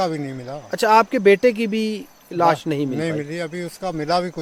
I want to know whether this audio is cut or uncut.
uncut